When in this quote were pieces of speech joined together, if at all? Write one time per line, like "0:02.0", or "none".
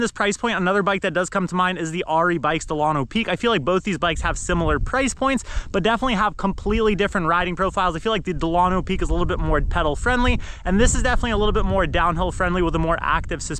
none